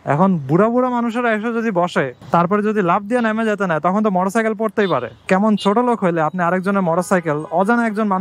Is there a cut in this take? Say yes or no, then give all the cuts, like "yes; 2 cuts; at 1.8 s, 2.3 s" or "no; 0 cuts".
yes; 2 cuts; at 2.2 s, 5.1 s